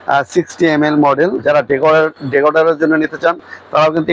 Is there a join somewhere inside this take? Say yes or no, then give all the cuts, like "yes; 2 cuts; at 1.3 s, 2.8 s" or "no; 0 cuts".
yes; 1 cut; at 1.4 s